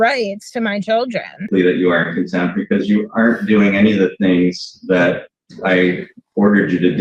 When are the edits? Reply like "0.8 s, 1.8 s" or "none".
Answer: 1.5 s